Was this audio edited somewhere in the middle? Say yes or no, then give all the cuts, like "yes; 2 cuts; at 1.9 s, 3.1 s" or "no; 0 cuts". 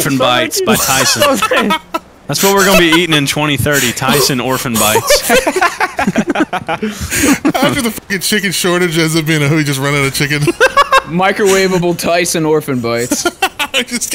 yes; 1 cut; at 2.1 s